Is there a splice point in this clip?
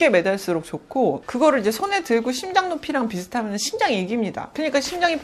no; 0 cuts

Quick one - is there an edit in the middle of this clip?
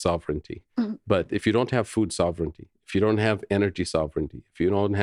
no; 0 cuts

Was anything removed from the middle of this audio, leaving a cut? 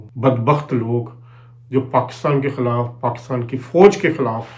no; 0 cuts

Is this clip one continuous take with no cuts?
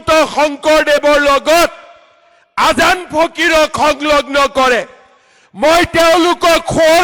yes; 0 cuts

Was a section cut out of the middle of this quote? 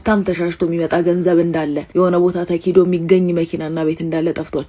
yes; 1 cut; at 1.8 s

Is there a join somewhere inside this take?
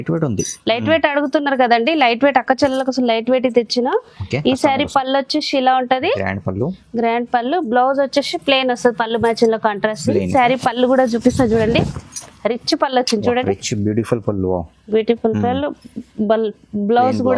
yes; 1 cut; at 10.3 s

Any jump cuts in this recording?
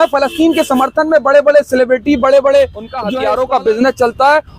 yes; 1 cut; at 3.0 s

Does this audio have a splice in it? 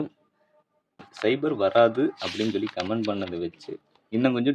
yes; 1 cut; at 1.0 s

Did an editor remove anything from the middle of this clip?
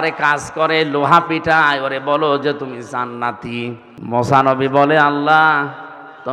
yes; 1 cut; at 3.9 s

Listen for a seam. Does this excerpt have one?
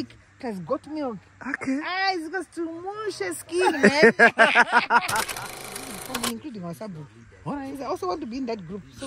yes; 1 cut; at 5.7 s

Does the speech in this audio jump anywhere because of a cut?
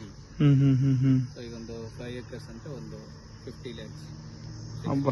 no; 0 cuts

